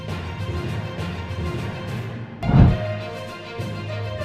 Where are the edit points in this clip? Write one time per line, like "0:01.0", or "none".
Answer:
0:01.7